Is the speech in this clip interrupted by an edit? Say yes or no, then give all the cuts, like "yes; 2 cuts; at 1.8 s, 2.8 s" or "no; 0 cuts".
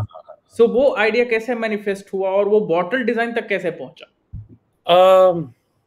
no; 0 cuts